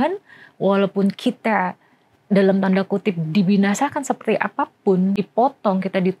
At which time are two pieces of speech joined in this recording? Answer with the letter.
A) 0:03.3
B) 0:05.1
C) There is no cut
B